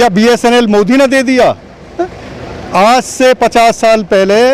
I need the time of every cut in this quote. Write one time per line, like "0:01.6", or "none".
none